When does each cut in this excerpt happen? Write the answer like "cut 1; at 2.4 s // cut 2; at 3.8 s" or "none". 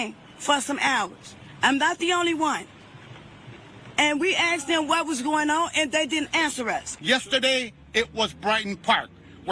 cut 1; at 6.9 s